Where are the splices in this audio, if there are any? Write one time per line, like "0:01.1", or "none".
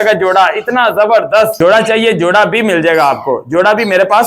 0:01.5